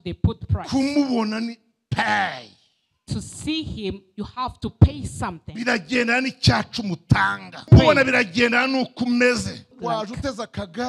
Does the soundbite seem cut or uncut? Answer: cut